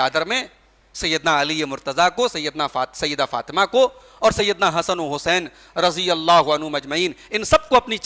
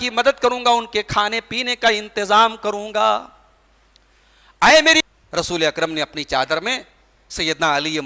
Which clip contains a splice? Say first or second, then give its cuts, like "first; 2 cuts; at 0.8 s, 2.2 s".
second; 1 cut; at 5.1 s